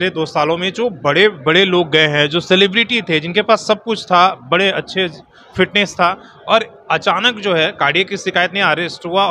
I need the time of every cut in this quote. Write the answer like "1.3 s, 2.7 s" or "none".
none